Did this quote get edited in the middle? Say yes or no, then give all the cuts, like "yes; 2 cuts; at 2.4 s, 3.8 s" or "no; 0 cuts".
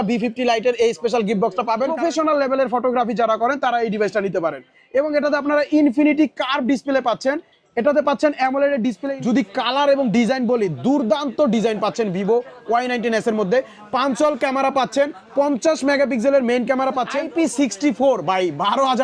yes; 3 cuts; at 1.9 s, 9.1 s, 17.2 s